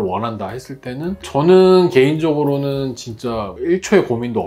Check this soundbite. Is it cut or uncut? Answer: uncut